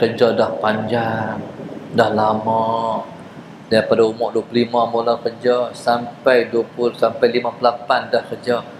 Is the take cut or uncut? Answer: uncut